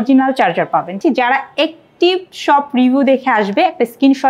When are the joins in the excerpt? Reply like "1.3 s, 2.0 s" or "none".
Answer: 1.0 s